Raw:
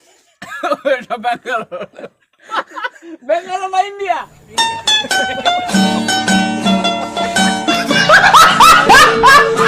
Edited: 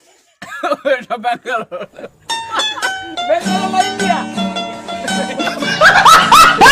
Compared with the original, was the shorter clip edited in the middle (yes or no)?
yes